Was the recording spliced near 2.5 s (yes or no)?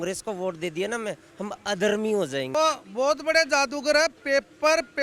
yes